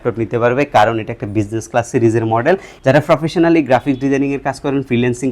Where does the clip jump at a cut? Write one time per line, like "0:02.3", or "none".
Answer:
0:02.7